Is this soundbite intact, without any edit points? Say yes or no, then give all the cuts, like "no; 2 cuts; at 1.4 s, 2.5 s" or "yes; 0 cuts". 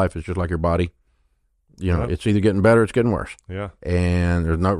yes; 0 cuts